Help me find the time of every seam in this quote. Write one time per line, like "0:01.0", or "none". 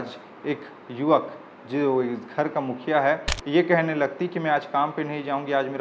0:03.3